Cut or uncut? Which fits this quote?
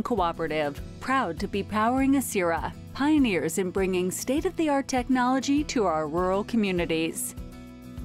cut